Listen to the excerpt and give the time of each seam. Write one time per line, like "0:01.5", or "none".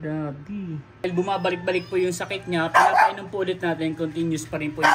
0:01.0